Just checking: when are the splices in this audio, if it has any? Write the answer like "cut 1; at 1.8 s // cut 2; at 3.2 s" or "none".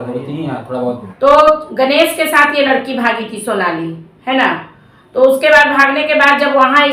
cut 1; at 1.1 s